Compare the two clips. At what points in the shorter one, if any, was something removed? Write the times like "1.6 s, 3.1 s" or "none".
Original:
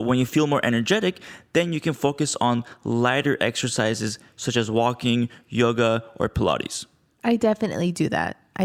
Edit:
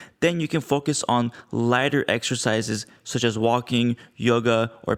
none